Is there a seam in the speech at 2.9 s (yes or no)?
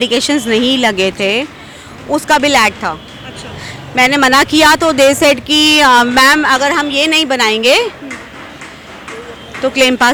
no